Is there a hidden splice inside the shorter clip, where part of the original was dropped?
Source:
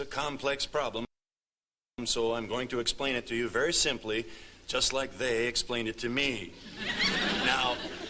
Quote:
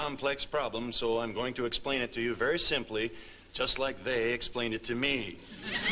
yes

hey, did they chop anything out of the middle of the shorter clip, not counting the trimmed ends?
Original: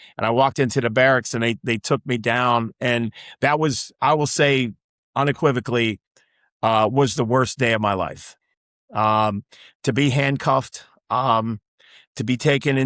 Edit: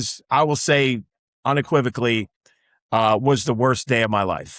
no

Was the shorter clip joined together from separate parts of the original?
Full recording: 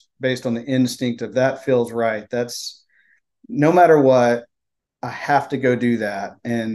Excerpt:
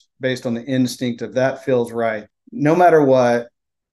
yes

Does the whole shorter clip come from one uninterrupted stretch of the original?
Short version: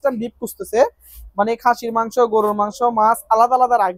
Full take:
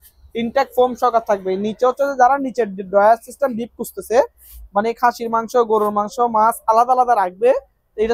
yes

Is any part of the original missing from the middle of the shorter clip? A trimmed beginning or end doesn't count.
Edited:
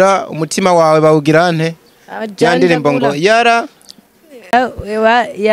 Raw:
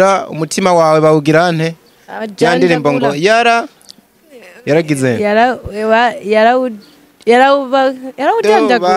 yes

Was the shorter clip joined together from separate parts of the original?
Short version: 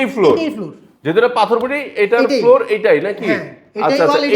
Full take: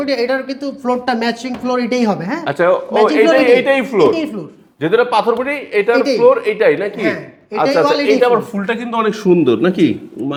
no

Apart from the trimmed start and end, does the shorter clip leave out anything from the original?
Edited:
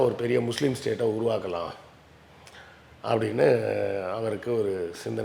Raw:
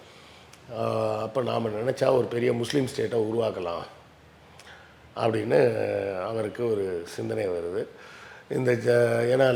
no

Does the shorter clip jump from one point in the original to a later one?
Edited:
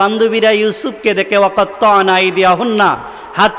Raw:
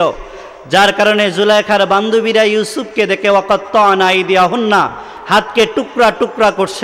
no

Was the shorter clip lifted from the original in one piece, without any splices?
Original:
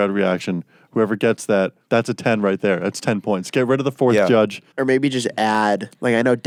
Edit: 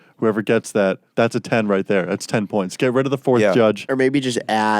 no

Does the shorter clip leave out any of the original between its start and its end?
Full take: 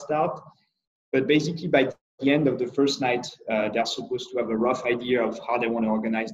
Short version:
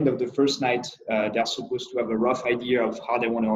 no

